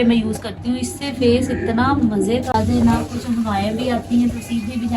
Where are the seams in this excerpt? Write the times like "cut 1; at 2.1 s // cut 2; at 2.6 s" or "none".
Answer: cut 1; at 2.5 s